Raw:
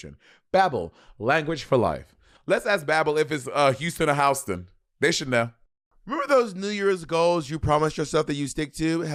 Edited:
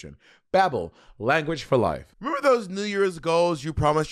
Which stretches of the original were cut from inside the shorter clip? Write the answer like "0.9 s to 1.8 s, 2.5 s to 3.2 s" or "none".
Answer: 2.1 s to 6.0 s